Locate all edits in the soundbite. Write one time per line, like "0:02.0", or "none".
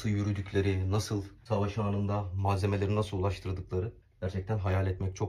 0:01.3
0:04.0